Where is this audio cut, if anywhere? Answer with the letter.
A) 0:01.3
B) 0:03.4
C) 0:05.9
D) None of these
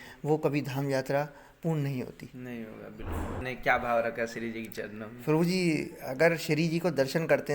B